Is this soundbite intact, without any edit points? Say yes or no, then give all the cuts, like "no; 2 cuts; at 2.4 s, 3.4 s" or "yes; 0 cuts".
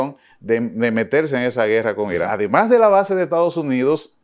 no; 1 cut; at 2.3 s